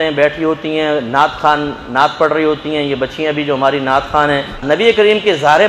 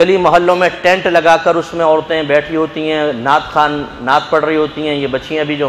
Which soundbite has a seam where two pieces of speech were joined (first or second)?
first